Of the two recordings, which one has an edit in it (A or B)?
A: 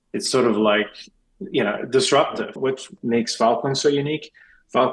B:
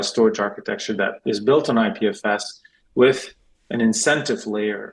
A